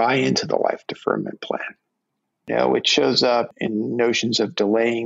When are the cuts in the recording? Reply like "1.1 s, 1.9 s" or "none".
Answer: 2.5 s, 3.5 s